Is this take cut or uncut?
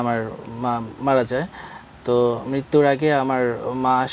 uncut